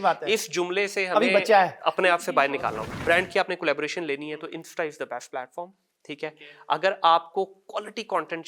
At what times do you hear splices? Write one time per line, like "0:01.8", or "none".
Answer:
0:02.9